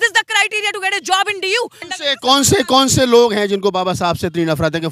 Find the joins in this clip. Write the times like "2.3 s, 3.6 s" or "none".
1.8 s